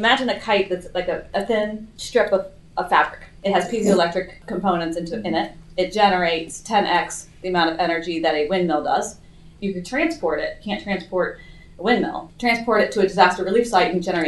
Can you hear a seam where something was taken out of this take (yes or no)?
yes